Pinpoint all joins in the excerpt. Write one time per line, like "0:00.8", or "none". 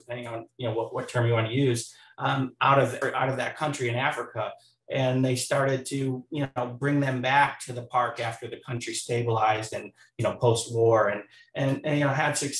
0:03.0